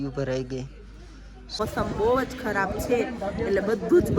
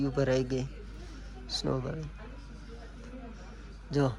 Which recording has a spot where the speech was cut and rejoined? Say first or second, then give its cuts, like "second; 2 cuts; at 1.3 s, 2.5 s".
first; 1 cut; at 1.6 s